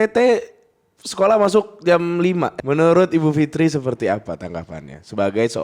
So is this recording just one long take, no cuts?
no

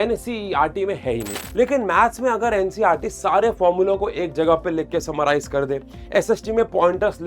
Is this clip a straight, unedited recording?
no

